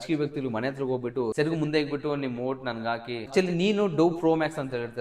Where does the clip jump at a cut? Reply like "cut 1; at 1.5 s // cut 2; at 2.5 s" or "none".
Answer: cut 1; at 1.3 s // cut 2; at 3.1 s